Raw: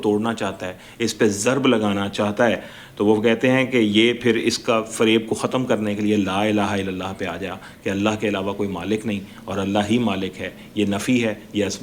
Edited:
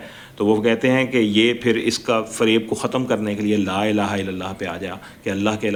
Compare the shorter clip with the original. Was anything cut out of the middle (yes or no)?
no